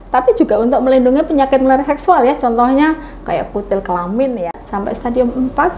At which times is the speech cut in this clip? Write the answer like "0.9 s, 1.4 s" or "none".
4.6 s